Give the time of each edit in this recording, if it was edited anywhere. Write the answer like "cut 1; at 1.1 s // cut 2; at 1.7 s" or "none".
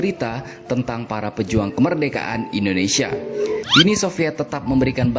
cut 1; at 3.6 s